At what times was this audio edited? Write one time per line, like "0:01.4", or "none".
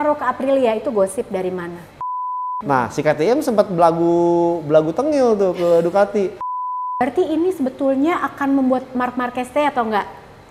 0:02.1
0:06.6